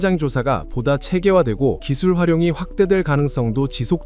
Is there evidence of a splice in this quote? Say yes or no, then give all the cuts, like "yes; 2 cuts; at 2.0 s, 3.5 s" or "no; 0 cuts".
yes; 1 cut; at 1.9 s